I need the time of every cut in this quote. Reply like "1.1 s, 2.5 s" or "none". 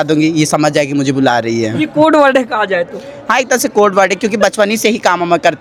none

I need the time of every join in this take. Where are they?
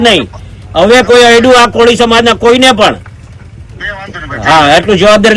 none

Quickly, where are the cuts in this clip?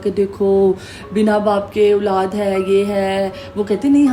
none

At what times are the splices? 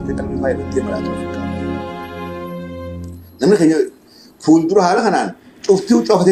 none

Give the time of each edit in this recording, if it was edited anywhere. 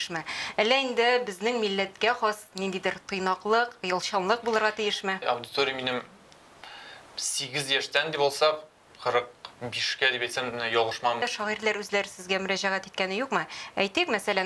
5.2 s, 11.2 s

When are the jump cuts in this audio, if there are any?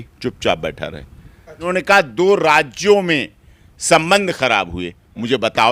1.7 s

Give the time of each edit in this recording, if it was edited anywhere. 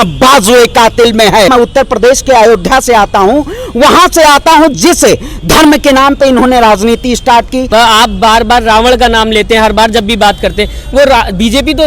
1.5 s, 7.7 s

